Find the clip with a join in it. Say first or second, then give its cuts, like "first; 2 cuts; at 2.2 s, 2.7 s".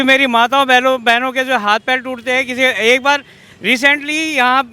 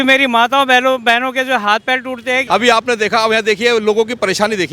second; 1 cut; at 2.4 s